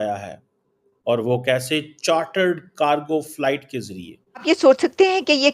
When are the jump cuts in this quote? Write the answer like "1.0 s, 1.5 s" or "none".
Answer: 4.4 s